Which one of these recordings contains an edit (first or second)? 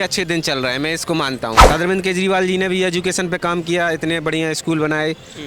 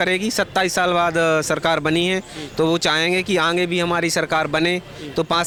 first